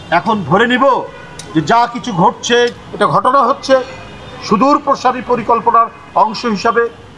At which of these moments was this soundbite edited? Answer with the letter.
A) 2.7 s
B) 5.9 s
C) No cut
A